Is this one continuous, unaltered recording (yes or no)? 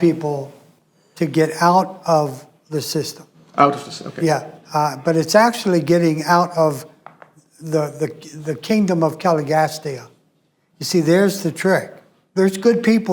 no